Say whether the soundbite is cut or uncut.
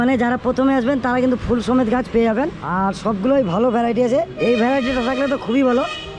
uncut